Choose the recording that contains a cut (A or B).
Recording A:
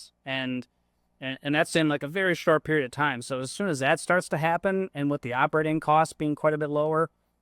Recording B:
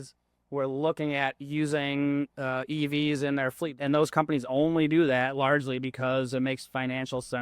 B